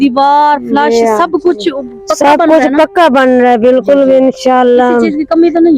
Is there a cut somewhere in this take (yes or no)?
no